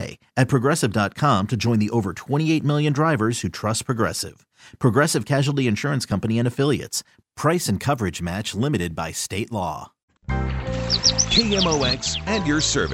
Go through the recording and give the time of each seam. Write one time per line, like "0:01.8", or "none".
0:10.2